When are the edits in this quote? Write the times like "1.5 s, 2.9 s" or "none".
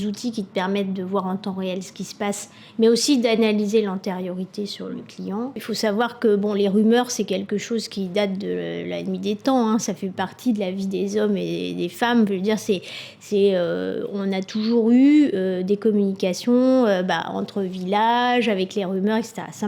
5.6 s